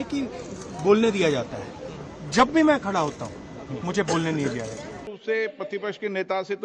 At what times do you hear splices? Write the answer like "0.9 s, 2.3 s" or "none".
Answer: 5.1 s